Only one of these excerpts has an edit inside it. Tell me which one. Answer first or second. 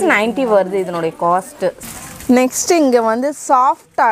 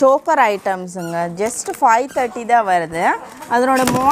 first